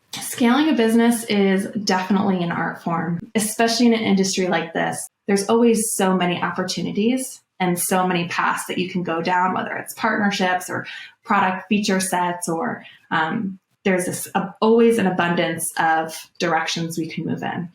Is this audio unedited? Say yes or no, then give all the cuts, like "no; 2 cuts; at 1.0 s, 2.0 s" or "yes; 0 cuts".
no; 2 cuts; at 3.2 s, 5.0 s